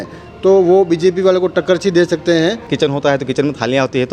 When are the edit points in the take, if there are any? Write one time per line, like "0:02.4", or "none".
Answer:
0:02.7